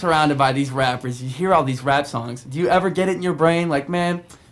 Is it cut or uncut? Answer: uncut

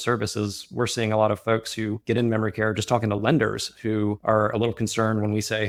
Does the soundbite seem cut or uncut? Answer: uncut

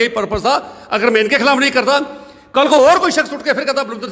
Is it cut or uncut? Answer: uncut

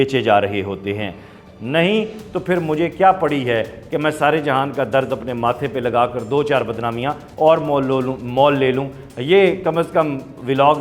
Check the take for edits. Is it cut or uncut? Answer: cut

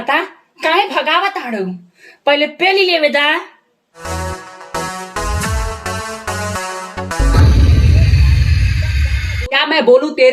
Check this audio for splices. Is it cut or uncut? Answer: cut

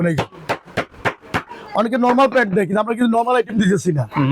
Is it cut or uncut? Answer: uncut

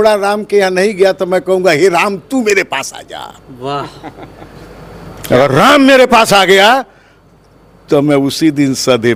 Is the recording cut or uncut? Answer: uncut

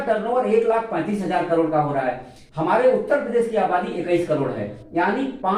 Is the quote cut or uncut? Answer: uncut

